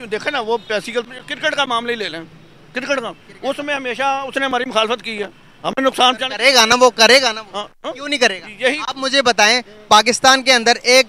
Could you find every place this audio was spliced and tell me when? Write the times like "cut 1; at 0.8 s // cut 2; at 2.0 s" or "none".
cut 1; at 1.0 s